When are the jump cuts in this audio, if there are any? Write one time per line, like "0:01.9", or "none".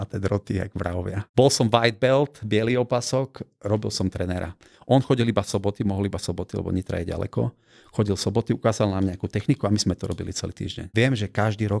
0:01.2
0:10.8